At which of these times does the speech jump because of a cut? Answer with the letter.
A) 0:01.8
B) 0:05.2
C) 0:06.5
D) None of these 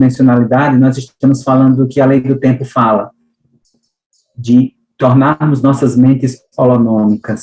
D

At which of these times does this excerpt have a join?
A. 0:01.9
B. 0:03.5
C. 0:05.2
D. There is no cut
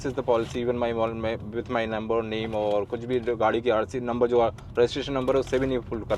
D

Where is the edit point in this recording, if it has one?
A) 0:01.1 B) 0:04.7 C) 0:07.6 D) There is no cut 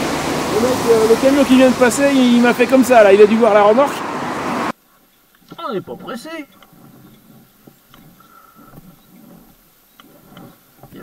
B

